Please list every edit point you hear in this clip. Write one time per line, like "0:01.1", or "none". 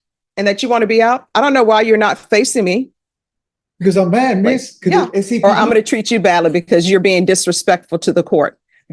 0:05.4